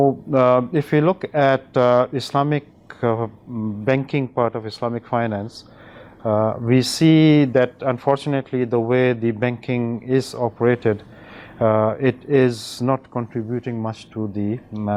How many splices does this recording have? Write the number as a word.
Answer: zero